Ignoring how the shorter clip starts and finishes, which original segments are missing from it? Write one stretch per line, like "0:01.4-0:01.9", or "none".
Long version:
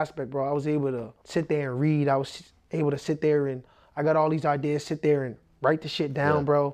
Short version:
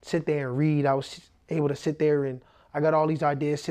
none